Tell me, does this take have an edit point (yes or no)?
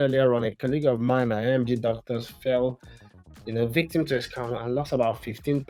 no